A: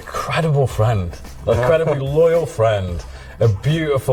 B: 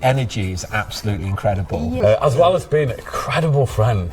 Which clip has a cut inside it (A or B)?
B